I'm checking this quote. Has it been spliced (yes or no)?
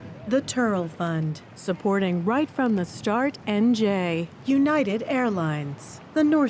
yes